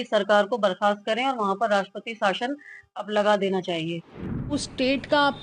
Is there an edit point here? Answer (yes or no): yes